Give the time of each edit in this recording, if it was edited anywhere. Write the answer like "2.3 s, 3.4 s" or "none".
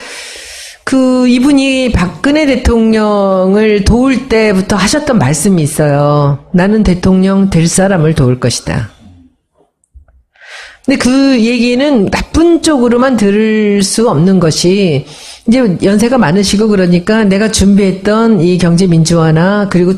none